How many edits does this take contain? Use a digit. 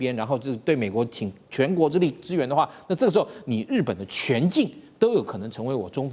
0